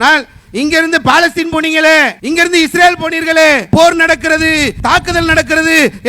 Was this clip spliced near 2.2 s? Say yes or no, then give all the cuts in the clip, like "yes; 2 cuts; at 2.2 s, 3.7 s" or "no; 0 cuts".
yes; 3 cuts; at 2.2 s, 3.6 s, 4.8 s